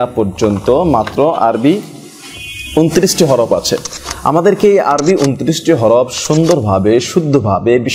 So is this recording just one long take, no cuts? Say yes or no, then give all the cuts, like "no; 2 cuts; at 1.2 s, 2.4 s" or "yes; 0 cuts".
yes; 0 cuts